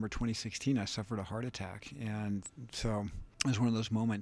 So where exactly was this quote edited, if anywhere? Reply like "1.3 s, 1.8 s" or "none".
3.2 s